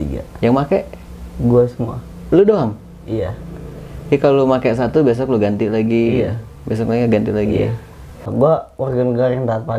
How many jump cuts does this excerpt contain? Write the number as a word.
one